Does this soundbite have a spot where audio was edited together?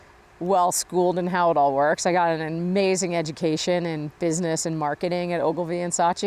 no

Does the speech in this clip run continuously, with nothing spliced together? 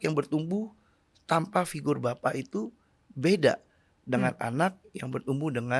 yes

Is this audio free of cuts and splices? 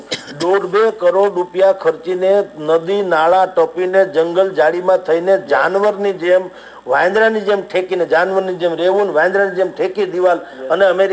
yes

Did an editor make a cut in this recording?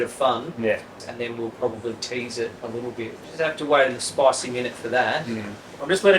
yes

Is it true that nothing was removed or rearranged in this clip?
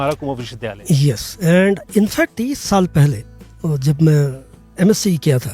no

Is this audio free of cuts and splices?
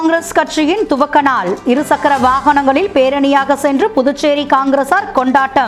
yes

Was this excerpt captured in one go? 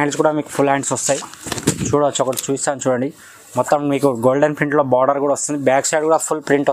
yes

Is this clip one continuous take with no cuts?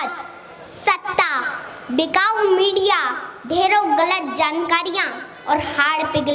yes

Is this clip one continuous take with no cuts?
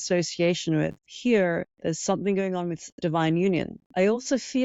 no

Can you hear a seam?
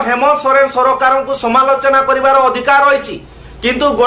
no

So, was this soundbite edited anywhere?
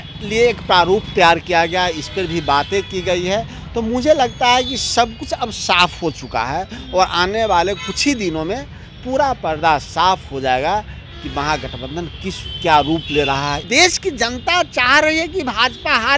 yes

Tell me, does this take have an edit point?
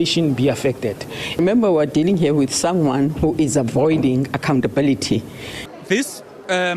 yes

